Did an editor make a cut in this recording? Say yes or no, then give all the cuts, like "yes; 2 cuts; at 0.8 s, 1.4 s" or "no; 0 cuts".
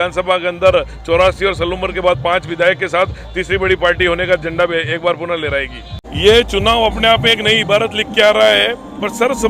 no; 0 cuts